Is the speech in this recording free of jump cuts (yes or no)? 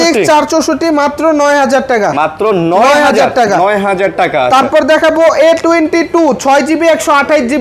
yes